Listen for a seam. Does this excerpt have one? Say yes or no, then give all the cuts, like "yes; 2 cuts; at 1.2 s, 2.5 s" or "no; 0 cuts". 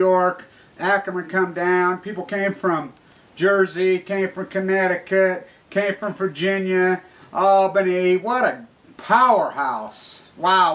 yes; 1 cut; at 7.9 s